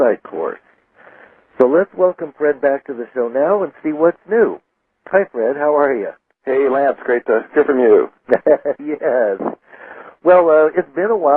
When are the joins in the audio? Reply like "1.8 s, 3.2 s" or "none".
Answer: 6.1 s